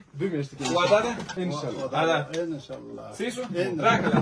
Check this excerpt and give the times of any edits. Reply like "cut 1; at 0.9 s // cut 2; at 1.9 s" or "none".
cut 1; at 1.3 s